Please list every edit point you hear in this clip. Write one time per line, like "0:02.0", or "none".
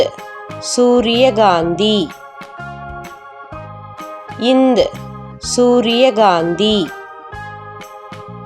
0:02.1
0:04.2
0:06.9